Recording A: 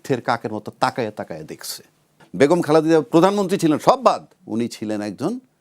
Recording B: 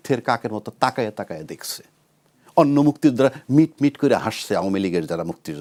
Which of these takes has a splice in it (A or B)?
A